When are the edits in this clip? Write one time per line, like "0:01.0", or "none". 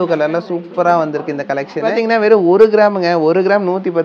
0:01.9